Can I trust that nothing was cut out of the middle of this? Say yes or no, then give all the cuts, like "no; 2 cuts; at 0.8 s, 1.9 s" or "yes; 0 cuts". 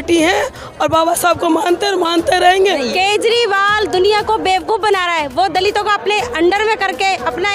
no; 1 cut; at 2.8 s